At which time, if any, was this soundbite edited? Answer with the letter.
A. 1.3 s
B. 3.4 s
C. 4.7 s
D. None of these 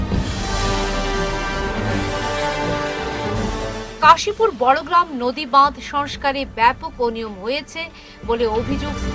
D